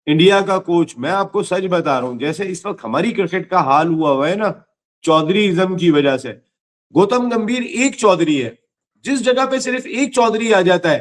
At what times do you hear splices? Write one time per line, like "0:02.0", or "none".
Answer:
none